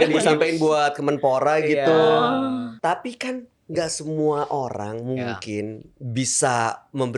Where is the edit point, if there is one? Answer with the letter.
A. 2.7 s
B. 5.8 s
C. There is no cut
A